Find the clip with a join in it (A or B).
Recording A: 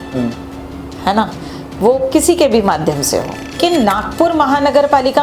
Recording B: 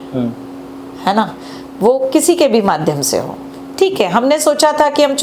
A